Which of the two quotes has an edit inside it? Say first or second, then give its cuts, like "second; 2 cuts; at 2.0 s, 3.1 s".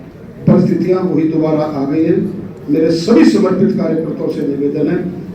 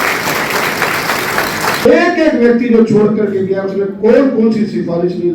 second; 1 cut; at 1.8 s